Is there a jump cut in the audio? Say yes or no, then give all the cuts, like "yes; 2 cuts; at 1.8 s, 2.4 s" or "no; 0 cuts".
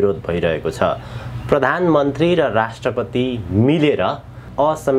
no; 0 cuts